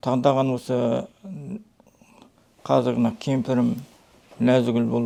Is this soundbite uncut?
yes; 0 cuts

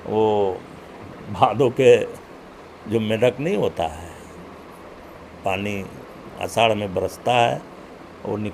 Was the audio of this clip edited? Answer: no; 0 cuts

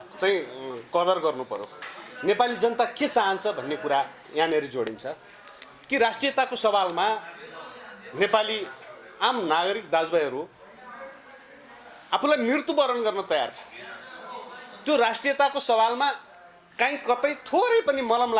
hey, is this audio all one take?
yes; 0 cuts

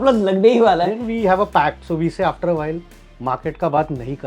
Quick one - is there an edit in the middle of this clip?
yes; 1 cut; at 0.9 s

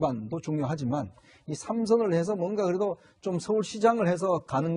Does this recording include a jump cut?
yes; 1 cut; at 1.4 s

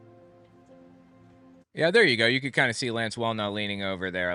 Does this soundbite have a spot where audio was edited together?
no; 0 cuts

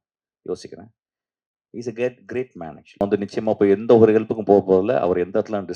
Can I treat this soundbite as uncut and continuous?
no; 1 cut; at 3.0 s

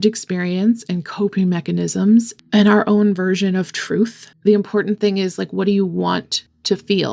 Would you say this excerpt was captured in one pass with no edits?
no; 1 cut; at 2.4 s

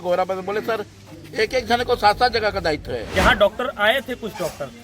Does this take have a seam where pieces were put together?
yes; 1 cut; at 3.0 s

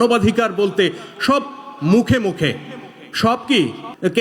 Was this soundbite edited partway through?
no; 0 cuts

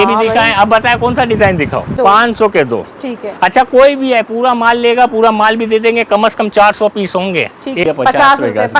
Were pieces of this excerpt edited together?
yes; 2 cuts; at 1.9 s, 7.8 s

